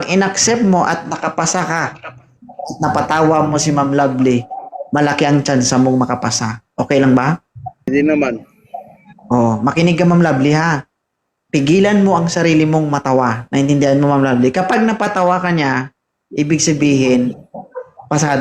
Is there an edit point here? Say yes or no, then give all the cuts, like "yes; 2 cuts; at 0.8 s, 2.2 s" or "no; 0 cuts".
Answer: no; 0 cuts